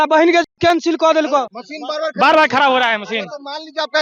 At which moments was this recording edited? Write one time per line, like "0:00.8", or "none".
0:01.5